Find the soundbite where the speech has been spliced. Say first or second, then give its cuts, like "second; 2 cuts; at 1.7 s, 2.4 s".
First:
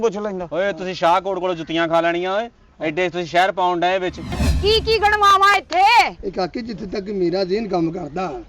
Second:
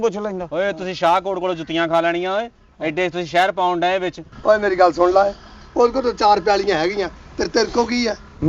first; 1 cut; at 4.4 s